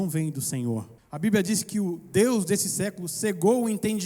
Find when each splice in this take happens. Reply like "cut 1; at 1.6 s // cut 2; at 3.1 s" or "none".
cut 1; at 1.0 s

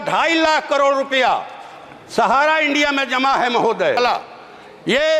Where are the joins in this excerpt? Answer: cut 1; at 4.0 s

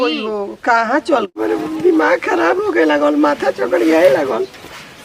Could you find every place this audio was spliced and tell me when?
cut 1; at 1.3 s

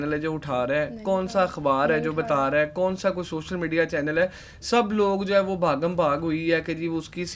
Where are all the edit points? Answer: none

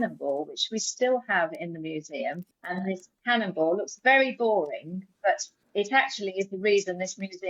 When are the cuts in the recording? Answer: cut 1; at 2.4 s // cut 2; at 5.5 s

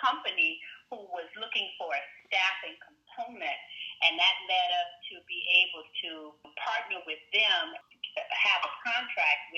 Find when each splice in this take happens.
cut 1; at 6.5 s // cut 2; at 7.8 s

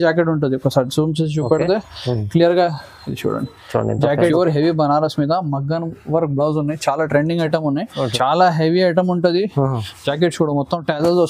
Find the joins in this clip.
cut 1; at 4.3 s // cut 2; at 8.0 s

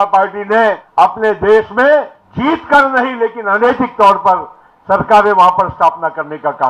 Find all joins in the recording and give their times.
cut 1; at 0.8 s // cut 2; at 2.2 s

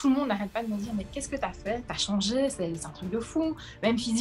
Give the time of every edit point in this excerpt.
cut 1; at 1.9 s

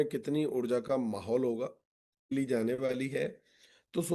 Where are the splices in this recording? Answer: cut 1; at 2.3 s

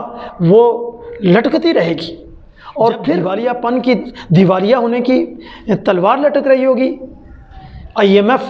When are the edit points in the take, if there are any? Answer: cut 1; at 3.3 s

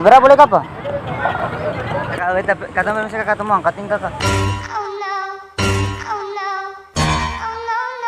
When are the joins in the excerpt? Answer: cut 1; at 2.2 s // cut 2; at 4.1 s

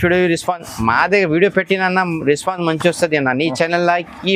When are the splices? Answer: none

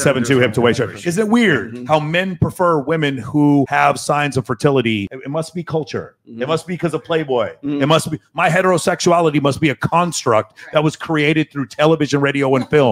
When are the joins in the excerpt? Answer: cut 1; at 3.7 s // cut 2; at 5.1 s

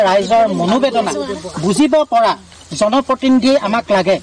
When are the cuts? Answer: none

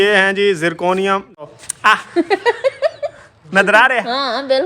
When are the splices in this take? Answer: cut 1; at 1.5 s

